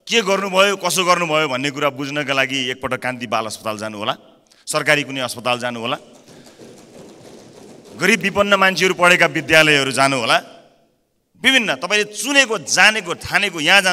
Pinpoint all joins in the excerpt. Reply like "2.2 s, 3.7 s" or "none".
none